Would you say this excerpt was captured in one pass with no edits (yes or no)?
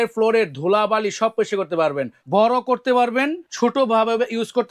no